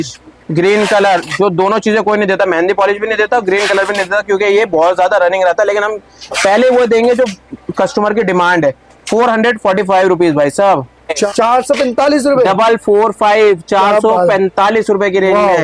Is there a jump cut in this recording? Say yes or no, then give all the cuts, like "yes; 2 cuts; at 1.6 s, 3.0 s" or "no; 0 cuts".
no; 0 cuts